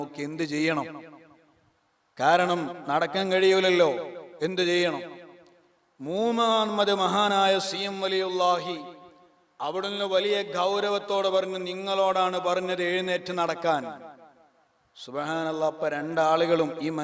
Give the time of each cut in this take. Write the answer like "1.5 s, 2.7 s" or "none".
none